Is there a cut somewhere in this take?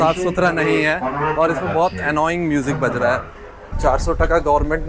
yes; 1 cut; at 3.7 s

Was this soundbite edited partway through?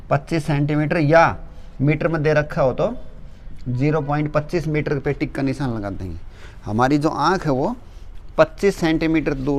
no; 0 cuts

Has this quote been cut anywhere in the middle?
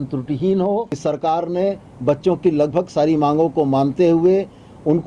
yes; 1 cut; at 1.0 s

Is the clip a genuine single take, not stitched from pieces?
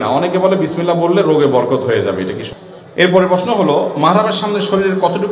no; 1 cut; at 2.4 s

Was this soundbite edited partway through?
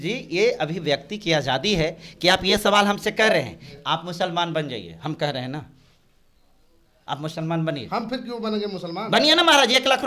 yes; 1 cut; at 3.6 s

